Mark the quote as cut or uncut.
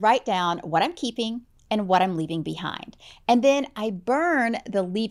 uncut